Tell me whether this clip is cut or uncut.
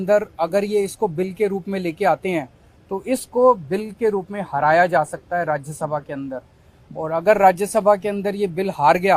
uncut